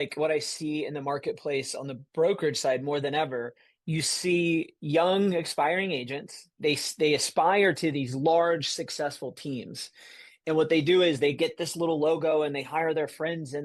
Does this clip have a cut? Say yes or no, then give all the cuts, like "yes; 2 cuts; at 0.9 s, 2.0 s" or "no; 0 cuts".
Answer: no; 0 cuts